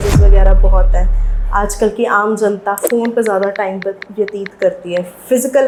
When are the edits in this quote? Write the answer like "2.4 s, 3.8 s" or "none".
none